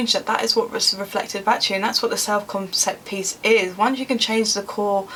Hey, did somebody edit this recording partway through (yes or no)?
no